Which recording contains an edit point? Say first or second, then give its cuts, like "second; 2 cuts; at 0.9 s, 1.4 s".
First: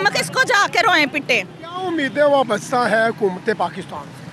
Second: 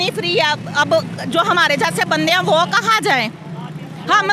first; 1 cut; at 1.6 s